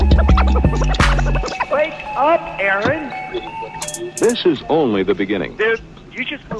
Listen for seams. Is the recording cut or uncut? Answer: uncut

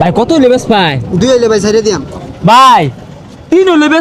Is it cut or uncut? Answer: uncut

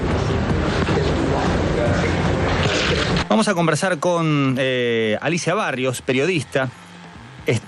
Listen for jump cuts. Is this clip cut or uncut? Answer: cut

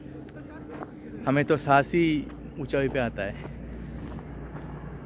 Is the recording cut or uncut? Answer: uncut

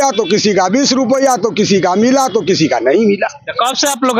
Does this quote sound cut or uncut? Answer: uncut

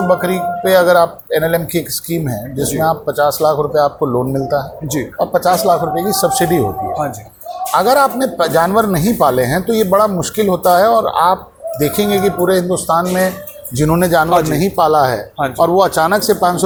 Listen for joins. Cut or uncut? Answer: uncut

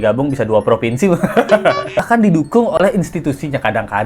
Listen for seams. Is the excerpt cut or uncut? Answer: cut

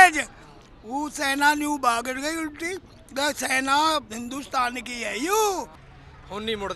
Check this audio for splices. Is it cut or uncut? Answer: cut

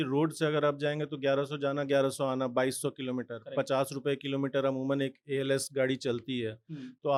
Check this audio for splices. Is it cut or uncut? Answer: uncut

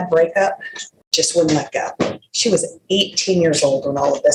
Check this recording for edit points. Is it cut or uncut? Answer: uncut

